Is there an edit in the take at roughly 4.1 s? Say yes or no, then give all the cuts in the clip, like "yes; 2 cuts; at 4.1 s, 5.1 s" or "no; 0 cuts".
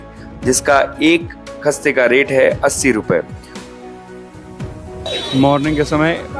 no; 0 cuts